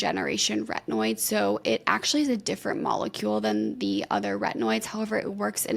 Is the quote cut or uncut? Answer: uncut